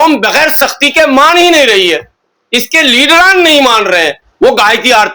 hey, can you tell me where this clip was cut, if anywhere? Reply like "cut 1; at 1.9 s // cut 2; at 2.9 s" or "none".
cut 1; at 4.2 s

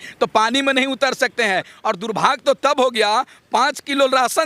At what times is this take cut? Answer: cut 1; at 1.7 s

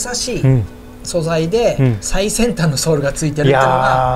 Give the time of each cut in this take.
none

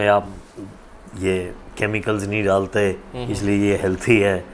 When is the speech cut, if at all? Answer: none

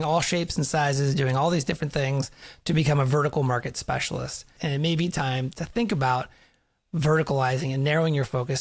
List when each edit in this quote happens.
cut 1; at 4.5 s

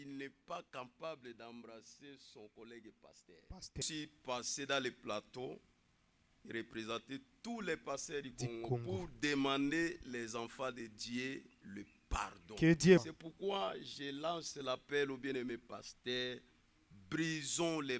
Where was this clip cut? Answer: cut 1; at 3.8 s // cut 2; at 13.1 s

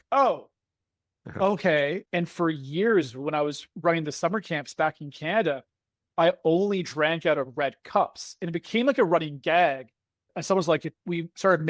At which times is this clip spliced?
cut 1; at 2.0 s

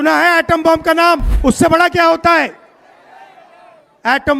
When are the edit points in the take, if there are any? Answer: cut 1; at 1.3 s

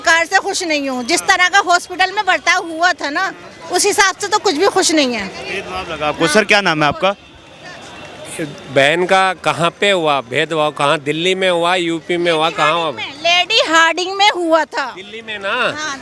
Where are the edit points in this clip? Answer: none

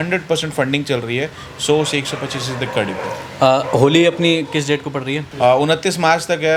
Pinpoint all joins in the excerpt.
none

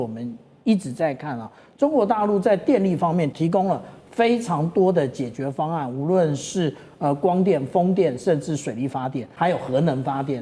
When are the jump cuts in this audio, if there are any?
cut 1; at 3.3 s // cut 2; at 9.2 s

